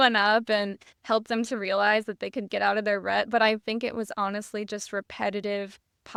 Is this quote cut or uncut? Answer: uncut